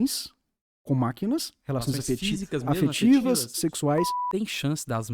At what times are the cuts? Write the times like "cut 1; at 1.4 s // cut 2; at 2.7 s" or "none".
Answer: cut 1; at 4.2 s